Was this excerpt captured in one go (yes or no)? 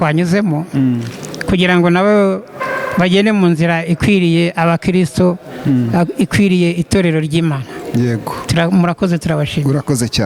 yes